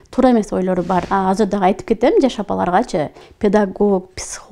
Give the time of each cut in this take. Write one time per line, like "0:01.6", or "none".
0:01.1
0:03.2